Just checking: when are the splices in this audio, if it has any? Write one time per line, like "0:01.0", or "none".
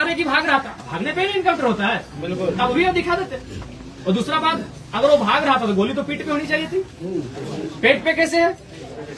none